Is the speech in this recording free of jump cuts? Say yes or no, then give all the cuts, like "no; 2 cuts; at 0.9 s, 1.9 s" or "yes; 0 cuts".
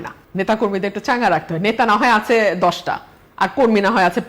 yes; 0 cuts